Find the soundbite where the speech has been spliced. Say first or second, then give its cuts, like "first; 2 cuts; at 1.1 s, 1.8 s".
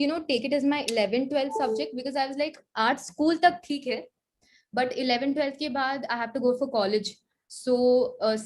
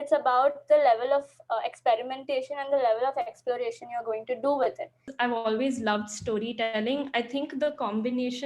second; 1 cut; at 5.1 s